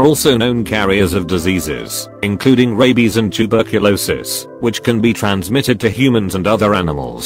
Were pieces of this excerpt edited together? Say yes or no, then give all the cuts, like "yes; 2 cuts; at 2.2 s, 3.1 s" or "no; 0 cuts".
no; 0 cuts